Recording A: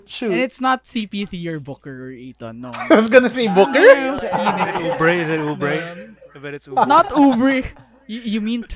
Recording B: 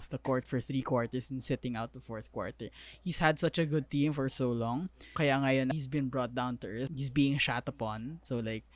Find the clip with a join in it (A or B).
B